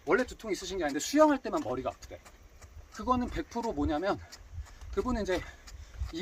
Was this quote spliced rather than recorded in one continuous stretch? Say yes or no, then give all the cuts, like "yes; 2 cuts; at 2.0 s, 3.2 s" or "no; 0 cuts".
no; 0 cuts